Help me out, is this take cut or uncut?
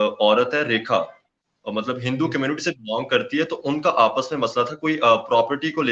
uncut